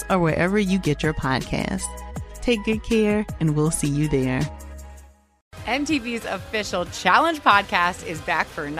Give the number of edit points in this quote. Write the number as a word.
one